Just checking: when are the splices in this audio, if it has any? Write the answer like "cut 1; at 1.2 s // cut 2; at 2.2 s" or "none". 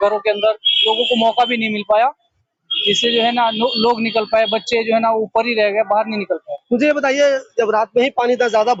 none